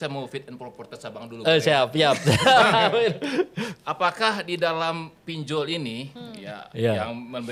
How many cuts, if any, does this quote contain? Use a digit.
0